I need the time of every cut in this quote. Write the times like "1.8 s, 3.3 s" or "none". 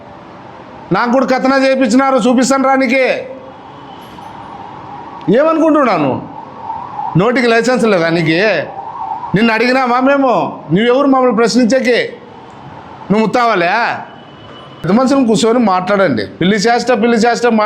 14.8 s